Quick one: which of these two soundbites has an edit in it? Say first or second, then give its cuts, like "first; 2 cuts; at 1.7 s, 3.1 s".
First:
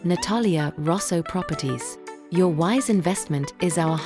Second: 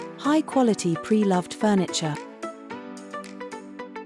second; 1 cut; at 2.2 s